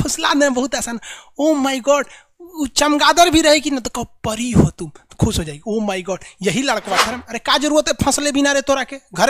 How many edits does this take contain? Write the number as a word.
one